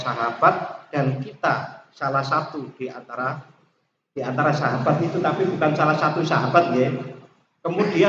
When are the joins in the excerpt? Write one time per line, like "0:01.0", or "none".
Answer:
none